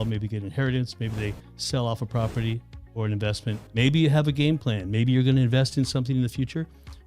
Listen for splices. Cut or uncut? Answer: cut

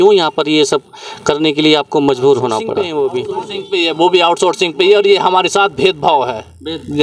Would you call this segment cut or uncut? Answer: cut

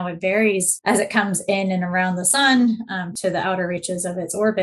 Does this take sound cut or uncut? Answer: cut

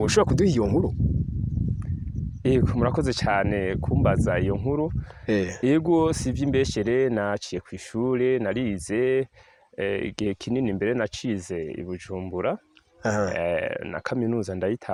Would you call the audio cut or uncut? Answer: uncut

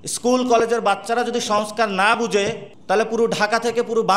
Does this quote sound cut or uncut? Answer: cut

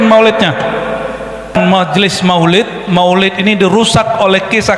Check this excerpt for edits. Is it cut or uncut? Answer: cut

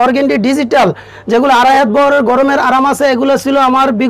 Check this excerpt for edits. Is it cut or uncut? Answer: uncut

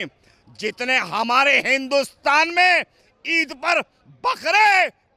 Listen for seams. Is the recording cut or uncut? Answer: uncut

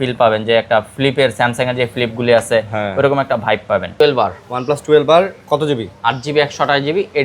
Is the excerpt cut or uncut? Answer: cut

